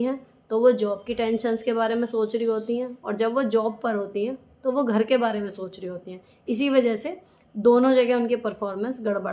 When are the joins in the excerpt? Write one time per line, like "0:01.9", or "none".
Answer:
0:06.4